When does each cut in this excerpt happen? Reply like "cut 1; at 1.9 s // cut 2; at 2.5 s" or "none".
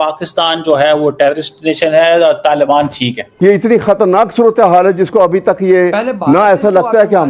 cut 1; at 3.2 s